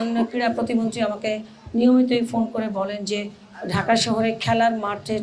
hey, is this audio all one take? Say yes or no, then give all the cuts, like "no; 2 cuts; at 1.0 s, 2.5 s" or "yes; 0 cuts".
yes; 0 cuts